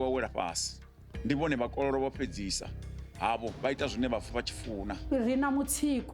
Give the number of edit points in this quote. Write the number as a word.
one